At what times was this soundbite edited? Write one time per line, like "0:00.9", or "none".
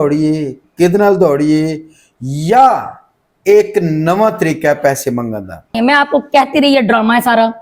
0:05.7